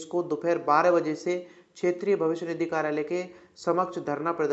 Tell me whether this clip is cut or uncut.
uncut